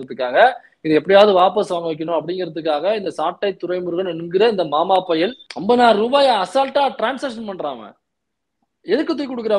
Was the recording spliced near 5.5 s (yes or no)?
yes